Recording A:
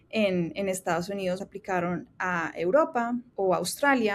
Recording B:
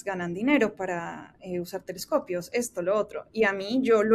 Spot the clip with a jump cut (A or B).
A